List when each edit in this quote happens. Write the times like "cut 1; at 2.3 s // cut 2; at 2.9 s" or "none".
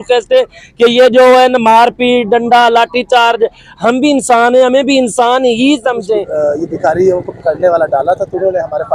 cut 1; at 6.3 s

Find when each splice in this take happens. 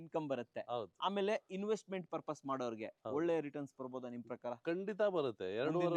none

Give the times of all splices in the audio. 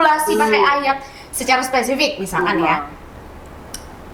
none

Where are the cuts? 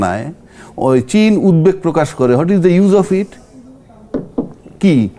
none

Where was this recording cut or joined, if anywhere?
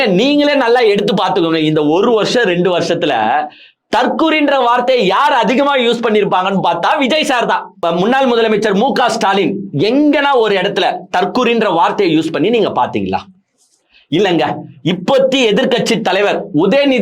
cut 1; at 7.8 s

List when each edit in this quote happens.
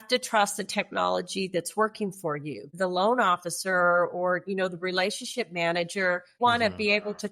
cut 1; at 2.7 s // cut 2; at 6.4 s

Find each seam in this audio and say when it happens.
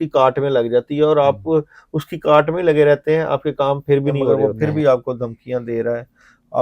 cut 1; at 4.5 s

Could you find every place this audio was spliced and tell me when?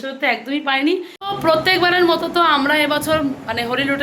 cut 1; at 1.2 s

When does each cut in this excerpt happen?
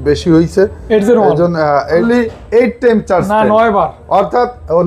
cut 1; at 2.0 s

